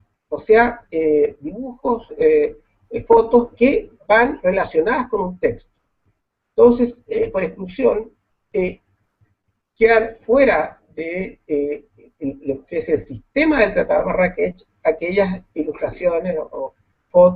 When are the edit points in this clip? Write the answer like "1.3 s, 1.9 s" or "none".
16.0 s